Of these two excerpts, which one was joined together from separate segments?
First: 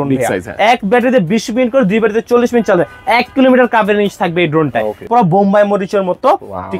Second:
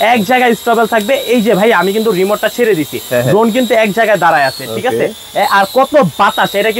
first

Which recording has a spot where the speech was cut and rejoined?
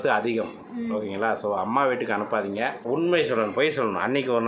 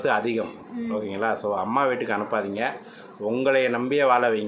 first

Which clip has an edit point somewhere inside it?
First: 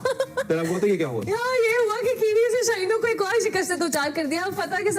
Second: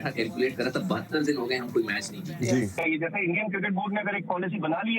second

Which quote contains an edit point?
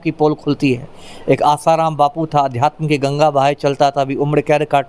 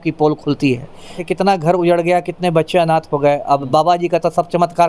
second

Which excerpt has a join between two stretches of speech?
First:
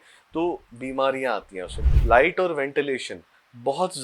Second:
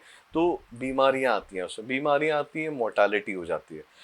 first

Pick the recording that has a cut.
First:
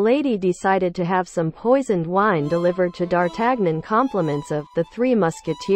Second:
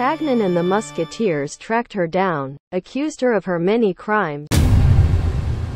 second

